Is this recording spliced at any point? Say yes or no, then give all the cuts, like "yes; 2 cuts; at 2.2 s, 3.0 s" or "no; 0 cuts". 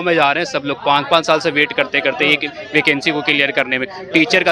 no; 0 cuts